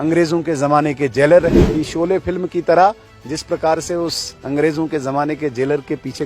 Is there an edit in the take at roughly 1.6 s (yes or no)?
yes